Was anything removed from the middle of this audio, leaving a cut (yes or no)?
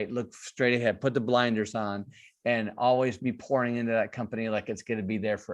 no